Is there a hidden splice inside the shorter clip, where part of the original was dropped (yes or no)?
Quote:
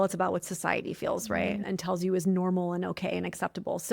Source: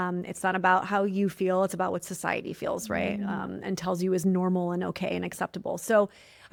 yes